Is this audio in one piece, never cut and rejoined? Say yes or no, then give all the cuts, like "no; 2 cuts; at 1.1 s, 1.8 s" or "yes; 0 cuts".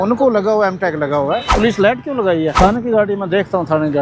no; 2 cuts; at 1.5 s, 2.5 s